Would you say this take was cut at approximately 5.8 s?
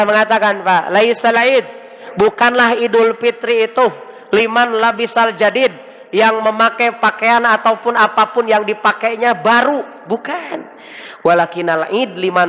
no; 0 cuts

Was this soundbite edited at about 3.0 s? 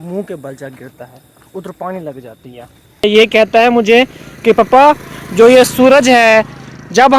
yes; 1 cut; at 3.0 s

